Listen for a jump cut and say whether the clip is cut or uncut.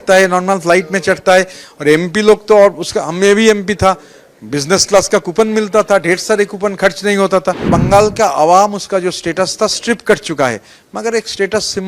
cut